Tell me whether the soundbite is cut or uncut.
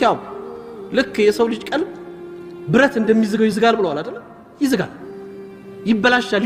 uncut